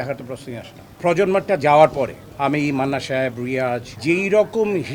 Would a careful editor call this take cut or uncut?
cut